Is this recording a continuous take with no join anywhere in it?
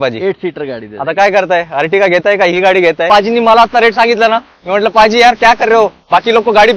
no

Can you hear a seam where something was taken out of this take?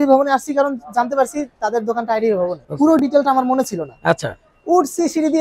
yes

